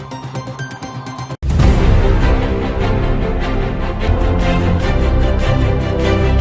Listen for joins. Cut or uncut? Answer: uncut